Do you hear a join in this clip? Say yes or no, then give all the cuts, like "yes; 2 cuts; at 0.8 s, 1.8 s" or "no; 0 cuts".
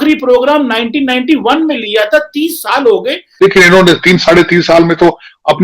yes; 1 cut; at 3.2 s